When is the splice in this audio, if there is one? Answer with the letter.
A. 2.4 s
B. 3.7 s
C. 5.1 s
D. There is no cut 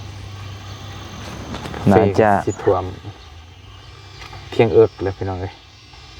A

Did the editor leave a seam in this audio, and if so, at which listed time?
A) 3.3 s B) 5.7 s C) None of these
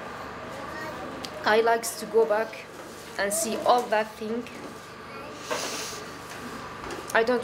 C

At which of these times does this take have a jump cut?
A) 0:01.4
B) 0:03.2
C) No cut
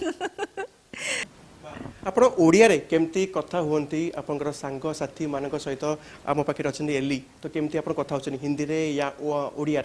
A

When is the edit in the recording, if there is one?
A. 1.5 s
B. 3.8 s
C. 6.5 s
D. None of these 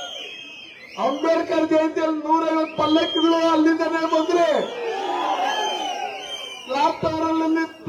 D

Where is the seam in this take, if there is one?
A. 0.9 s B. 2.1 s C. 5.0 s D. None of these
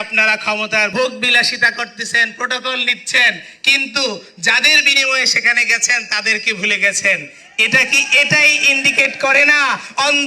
A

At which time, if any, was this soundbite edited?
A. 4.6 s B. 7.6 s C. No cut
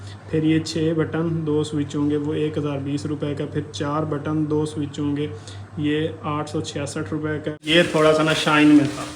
B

